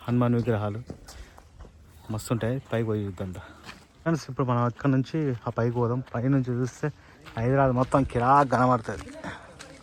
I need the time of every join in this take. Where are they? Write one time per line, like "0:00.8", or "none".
none

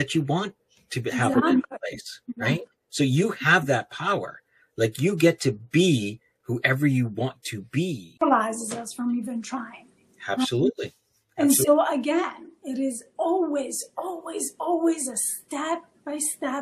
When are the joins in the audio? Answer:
0:08.2

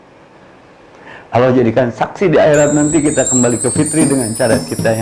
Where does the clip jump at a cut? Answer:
none

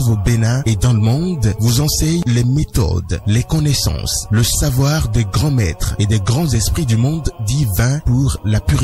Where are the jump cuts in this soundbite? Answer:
0:02.2

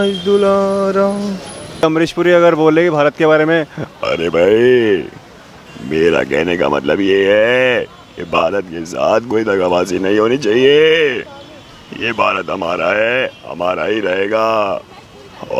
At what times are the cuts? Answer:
0:01.8

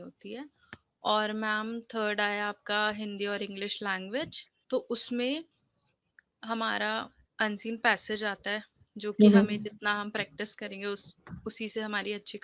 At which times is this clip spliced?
none

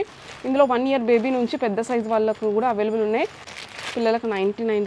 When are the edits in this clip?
0:03.5

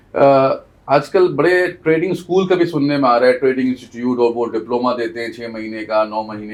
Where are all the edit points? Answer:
none

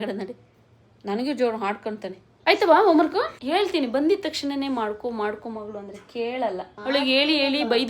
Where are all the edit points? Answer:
0:02.2
0:06.7

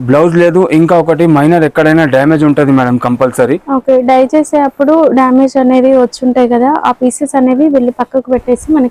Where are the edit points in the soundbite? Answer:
none

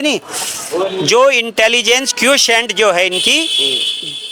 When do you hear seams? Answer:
none

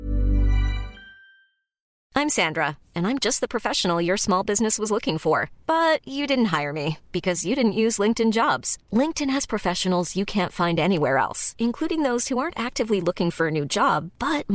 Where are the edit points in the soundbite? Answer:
0:01.9

